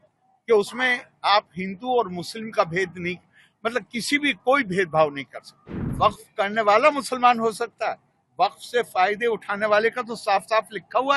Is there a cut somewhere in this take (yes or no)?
yes